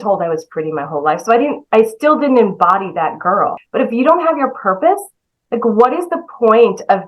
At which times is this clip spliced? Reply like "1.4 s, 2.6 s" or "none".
3.6 s